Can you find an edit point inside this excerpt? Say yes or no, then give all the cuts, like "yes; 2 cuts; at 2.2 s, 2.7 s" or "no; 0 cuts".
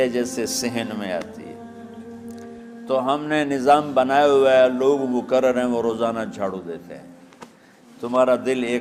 no; 0 cuts